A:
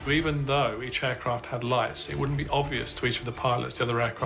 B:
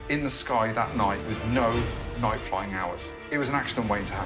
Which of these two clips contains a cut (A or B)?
B